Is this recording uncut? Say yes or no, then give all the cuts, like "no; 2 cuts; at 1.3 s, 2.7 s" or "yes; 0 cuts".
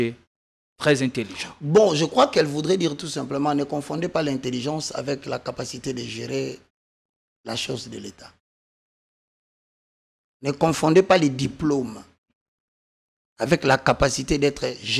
yes; 0 cuts